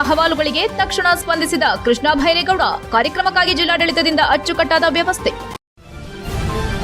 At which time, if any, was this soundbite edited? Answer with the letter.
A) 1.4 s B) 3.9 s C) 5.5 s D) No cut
C